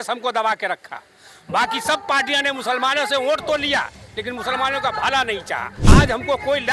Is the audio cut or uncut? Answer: cut